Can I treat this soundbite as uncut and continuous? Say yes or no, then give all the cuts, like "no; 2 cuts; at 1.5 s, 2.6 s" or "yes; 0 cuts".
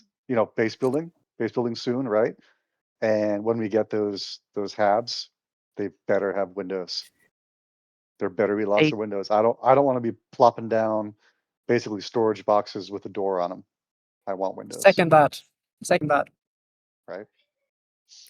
yes; 0 cuts